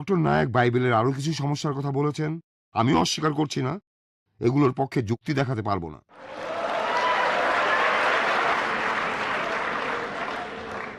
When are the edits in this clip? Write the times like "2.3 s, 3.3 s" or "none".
6.4 s, 8.5 s